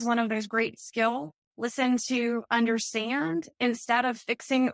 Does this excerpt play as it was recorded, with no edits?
no; 1 cut; at 1.4 s

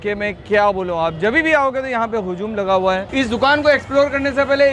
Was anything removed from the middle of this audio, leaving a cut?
yes; 1 cut; at 3.0 s

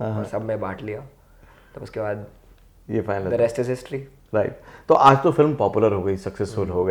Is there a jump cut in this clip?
no; 0 cuts

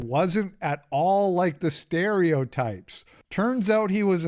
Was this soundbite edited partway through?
no; 0 cuts

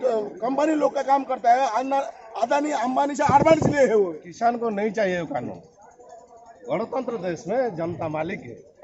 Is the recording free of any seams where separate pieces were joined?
no; 1 cut; at 4.2 s

